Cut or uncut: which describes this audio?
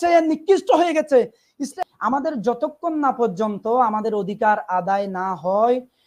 cut